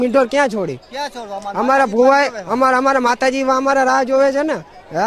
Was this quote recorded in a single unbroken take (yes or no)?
yes